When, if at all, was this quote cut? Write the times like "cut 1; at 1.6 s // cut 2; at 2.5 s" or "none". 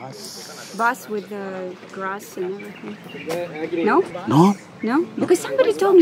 cut 1; at 4.2 s